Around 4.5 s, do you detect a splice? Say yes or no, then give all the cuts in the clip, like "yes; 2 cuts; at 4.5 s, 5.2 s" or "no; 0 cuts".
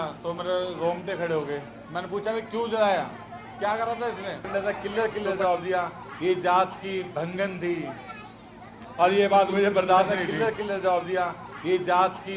yes; 2 cuts; at 4.5 s, 10.2 s